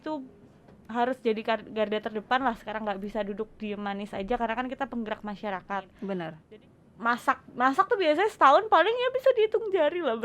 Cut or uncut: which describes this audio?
cut